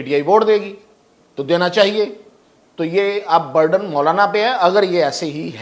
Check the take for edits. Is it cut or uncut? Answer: uncut